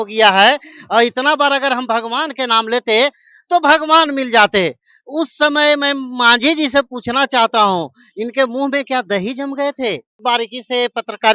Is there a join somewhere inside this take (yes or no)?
yes